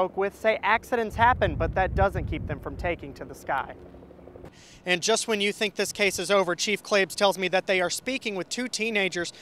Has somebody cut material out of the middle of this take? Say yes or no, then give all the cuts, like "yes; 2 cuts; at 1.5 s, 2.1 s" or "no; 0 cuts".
yes; 1 cut; at 4.5 s